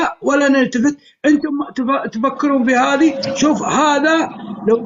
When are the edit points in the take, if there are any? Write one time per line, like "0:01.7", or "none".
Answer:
none